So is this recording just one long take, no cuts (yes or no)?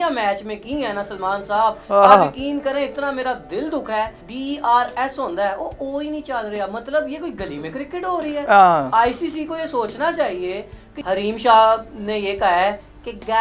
no